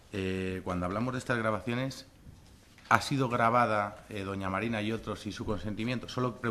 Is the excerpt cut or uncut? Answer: uncut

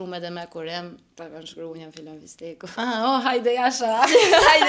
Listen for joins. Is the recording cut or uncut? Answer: cut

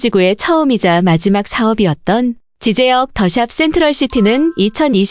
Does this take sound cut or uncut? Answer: uncut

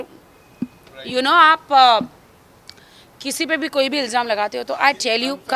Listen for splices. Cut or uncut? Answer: uncut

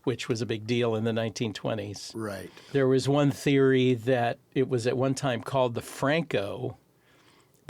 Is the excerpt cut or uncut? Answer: cut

